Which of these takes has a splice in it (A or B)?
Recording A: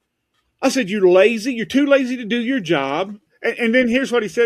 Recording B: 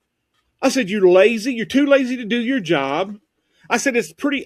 A